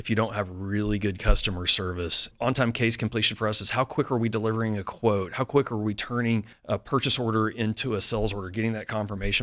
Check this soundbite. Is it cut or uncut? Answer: cut